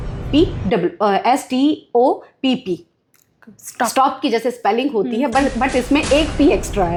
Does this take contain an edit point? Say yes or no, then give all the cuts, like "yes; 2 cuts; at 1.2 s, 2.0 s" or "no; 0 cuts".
no; 0 cuts